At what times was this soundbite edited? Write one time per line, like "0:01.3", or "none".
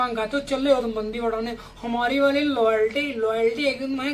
none

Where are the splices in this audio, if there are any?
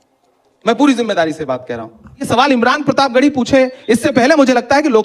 0:02.3

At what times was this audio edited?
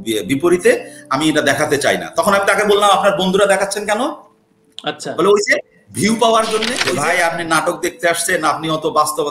0:06.8

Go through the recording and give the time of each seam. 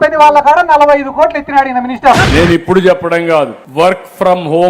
0:02.2

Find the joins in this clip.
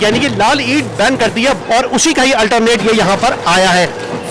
0:01.6

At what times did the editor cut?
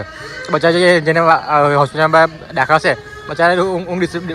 none

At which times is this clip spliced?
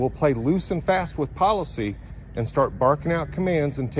none

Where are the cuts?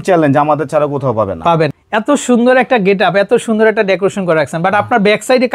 0:01.8

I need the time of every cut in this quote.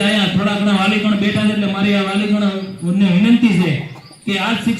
none

